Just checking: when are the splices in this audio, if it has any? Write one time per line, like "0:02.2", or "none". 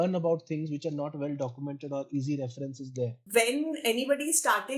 0:03.2

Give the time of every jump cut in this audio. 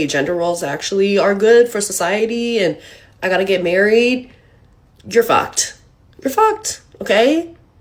none

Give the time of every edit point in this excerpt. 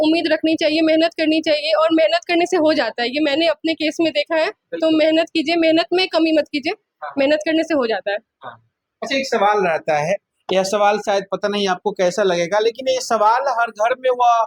none

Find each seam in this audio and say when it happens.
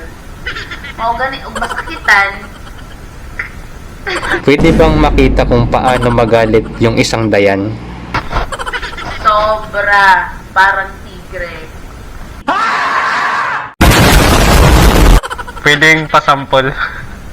0:04.3

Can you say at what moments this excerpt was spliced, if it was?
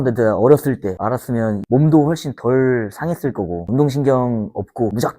0:01.6
0:03.6

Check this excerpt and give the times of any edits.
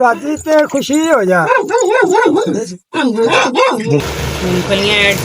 0:04.0

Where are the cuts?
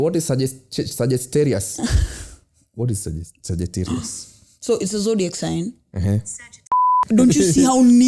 0:07.0

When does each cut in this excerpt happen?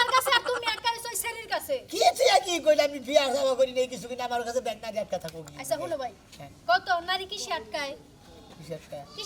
none

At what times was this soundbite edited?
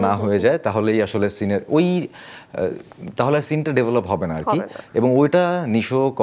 none

